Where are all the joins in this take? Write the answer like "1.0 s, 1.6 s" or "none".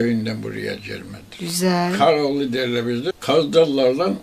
3.1 s